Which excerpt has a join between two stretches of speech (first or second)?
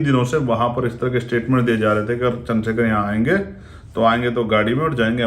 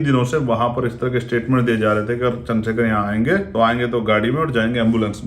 second